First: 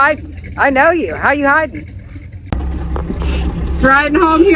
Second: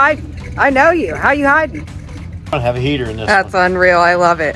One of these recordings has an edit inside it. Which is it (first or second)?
second